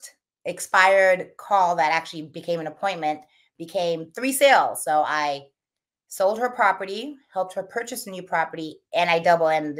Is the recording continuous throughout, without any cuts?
yes; 0 cuts

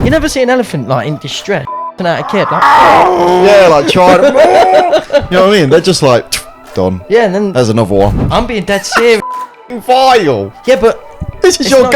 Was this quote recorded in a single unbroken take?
no; 1 cut; at 8.1 s

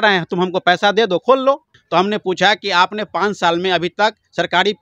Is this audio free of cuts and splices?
no; 1 cut; at 1.7 s

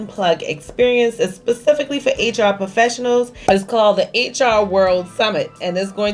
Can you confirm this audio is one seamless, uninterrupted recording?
no; 1 cut; at 3.3 s

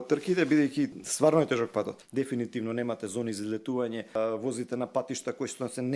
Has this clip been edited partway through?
yes; 3 cuts; at 1.0 s, 2.0 s, 4.2 s

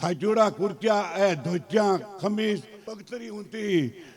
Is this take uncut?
no; 1 cut; at 2.8 s

